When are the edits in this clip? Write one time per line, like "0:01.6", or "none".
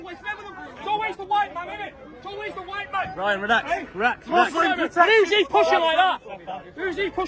none